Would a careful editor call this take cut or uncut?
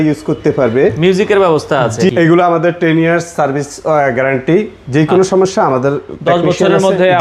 cut